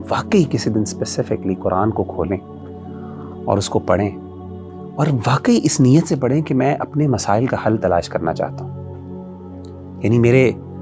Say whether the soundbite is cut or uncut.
uncut